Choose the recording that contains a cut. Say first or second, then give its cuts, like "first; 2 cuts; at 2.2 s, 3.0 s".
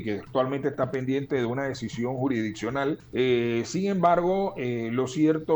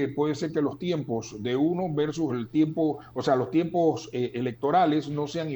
first; 1 cut; at 3.0 s